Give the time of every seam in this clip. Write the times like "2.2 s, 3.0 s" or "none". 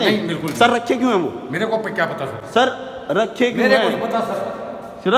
none